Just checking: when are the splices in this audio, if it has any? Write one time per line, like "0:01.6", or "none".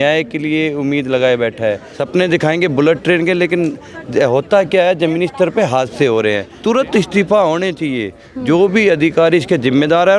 0:01.9
0:06.5